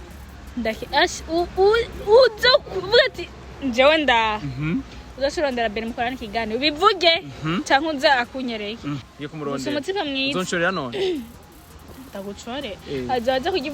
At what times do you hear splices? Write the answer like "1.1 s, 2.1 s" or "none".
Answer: 9.0 s